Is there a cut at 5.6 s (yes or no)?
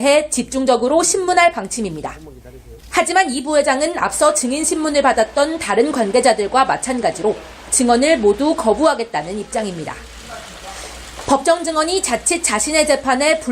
yes